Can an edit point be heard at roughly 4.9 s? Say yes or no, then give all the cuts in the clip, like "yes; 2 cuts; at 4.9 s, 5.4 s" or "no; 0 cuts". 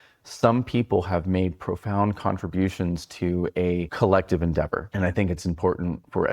yes; 2 cuts; at 3.9 s, 4.9 s